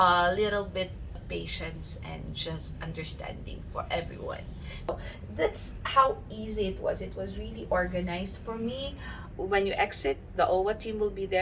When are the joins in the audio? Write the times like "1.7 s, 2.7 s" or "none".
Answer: 1.2 s, 4.9 s, 9.1 s